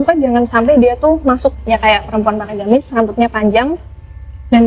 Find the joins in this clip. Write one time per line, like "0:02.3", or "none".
0:01.5